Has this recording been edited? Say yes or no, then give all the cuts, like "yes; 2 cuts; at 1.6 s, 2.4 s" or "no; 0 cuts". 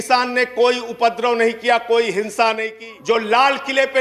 yes; 1 cut; at 2.7 s